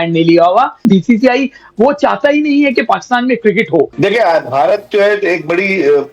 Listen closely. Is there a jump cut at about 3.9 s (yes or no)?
yes